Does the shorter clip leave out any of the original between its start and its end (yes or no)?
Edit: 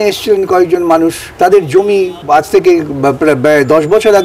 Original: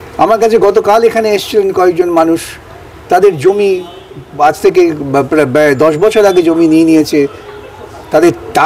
yes